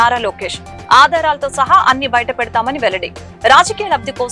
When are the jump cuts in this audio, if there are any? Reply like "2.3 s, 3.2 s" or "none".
none